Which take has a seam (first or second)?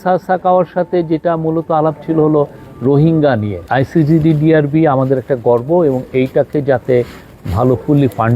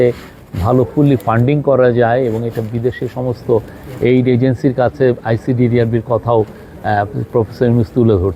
first